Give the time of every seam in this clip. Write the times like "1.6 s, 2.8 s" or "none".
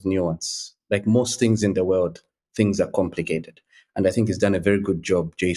none

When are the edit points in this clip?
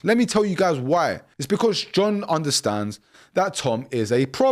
1.3 s

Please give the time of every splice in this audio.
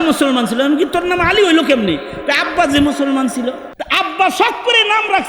3.7 s

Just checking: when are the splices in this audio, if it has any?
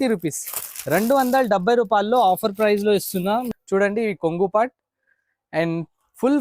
3.5 s

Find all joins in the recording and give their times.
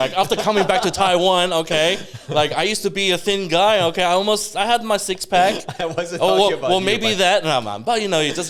none

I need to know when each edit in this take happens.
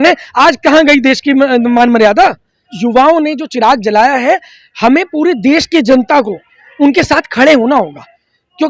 2.7 s

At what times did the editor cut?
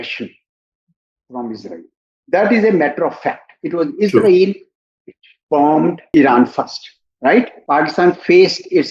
6.1 s, 7.6 s

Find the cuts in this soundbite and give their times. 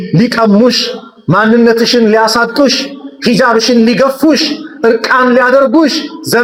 none

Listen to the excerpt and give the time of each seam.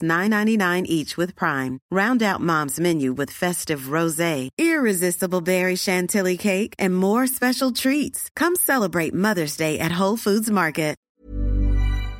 11.0 s

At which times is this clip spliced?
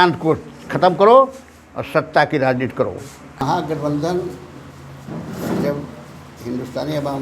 3.4 s

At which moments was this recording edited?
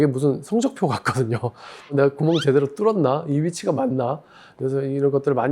1.9 s

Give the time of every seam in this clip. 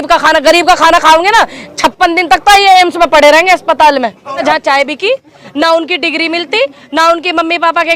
4.4 s

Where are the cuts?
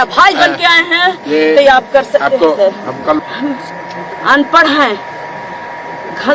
3.2 s

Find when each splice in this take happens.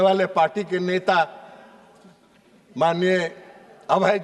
none

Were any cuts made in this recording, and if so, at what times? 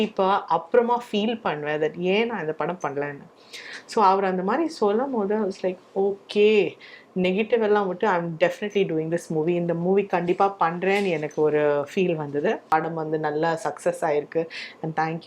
12.6 s

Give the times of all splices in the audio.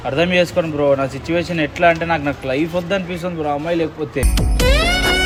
none

